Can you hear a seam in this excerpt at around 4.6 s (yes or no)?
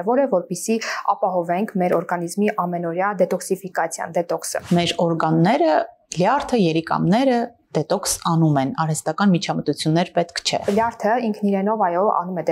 yes